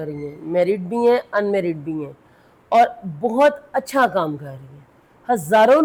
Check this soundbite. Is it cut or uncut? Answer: uncut